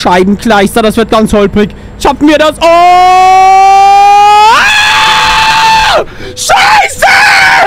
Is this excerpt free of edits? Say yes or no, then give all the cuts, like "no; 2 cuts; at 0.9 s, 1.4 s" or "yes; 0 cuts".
yes; 0 cuts